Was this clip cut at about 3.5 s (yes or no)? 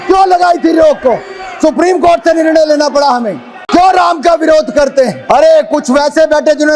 yes